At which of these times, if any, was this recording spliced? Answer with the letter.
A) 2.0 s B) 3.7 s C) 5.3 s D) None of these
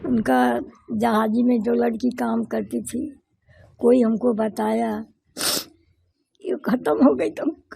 D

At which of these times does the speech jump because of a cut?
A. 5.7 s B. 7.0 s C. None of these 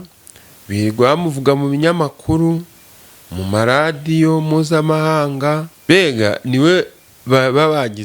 A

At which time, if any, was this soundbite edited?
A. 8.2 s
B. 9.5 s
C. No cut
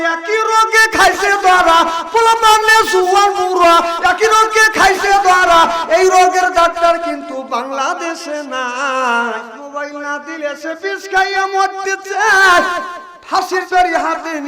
B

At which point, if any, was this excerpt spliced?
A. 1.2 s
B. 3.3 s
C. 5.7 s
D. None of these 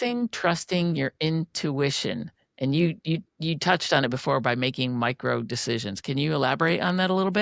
D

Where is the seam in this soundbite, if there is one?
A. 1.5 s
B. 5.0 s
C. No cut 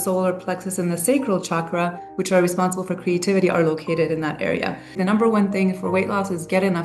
B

